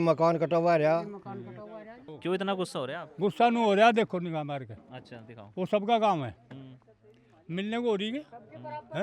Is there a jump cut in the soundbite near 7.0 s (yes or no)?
no